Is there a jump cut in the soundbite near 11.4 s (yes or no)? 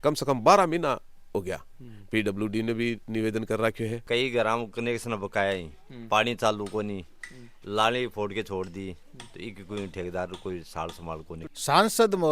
yes